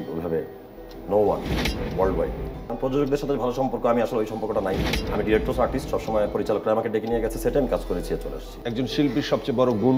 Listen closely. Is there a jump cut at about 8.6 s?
yes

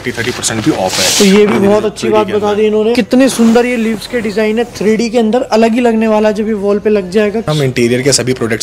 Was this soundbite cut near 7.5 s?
yes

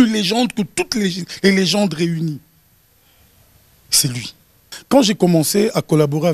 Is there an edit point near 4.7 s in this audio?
yes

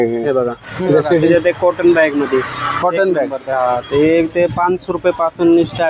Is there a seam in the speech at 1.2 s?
yes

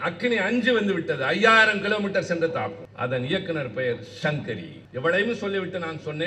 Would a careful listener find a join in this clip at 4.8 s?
yes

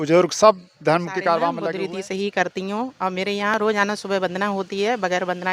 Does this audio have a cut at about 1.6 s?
yes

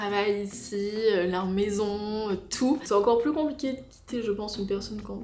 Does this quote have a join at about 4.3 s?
no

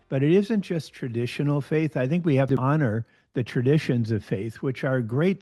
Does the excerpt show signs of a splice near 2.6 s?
yes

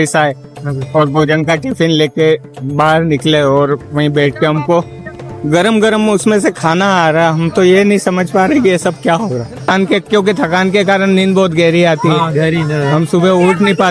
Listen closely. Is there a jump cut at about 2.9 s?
no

